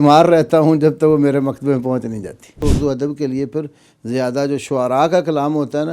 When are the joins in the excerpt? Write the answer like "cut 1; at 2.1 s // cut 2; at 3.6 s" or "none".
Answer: cut 1; at 2.6 s